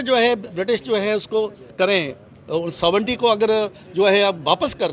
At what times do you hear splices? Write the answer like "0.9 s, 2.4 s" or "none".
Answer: none